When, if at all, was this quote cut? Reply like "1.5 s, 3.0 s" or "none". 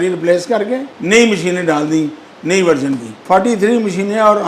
0.9 s, 3.1 s